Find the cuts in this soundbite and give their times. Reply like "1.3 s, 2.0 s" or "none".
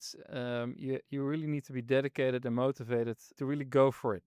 3.2 s

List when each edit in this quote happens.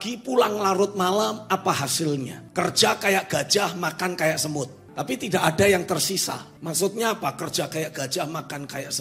2.4 s, 4.8 s, 6.5 s

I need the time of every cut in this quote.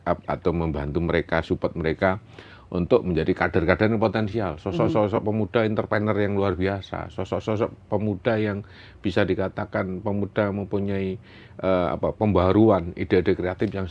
none

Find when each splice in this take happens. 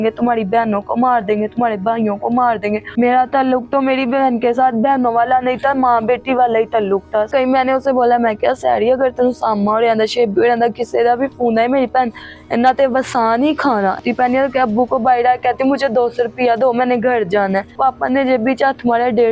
2.9 s, 7.3 s, 14.0 s, 17.7 s

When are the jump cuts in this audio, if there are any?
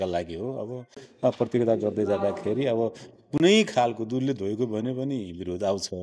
none

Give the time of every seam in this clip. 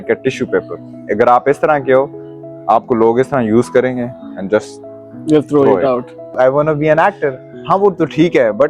6.3 s

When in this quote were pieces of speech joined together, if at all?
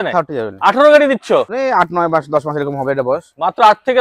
1.5 s

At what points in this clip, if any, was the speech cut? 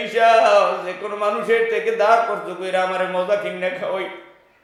none

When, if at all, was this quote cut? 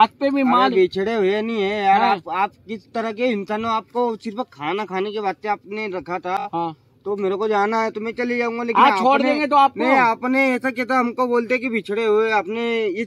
none

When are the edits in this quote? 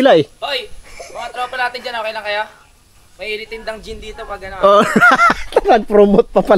none

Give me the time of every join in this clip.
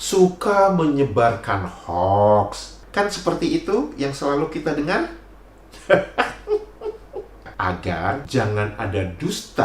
7.5 s

